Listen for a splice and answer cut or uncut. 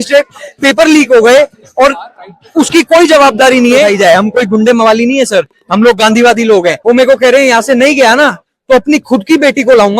cut